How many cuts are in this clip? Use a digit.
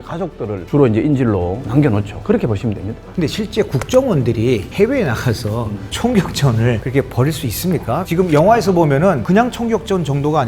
1